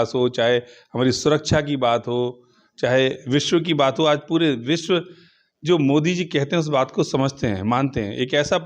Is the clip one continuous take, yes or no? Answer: yes